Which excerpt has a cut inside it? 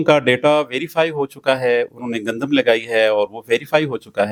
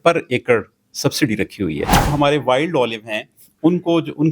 second; 1 cut; at 2.1 s

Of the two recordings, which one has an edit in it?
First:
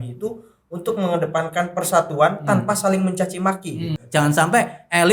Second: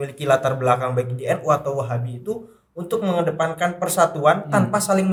first; 1 cut; at 4.0 s

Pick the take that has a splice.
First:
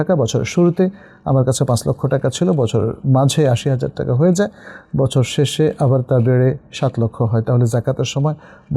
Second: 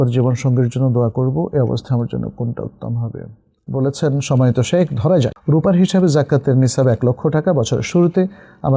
second; 2 cuts; at 3.6 s, 5.4 s

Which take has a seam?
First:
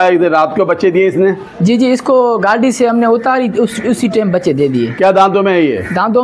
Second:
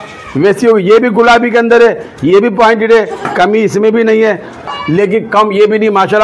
second; 1 cut; at 4.7 s

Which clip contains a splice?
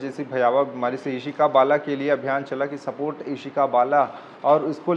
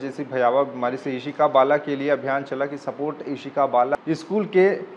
second; 1 cut; at 4.0 s

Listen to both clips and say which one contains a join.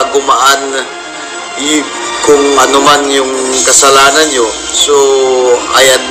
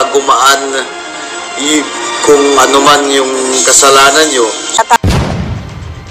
second; 1 cut; at 4.7 s

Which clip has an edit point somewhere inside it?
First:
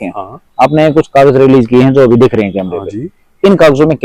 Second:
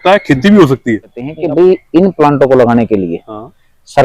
second; 1 cut; at 1.4 s

